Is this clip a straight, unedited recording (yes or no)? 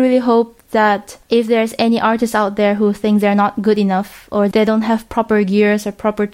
no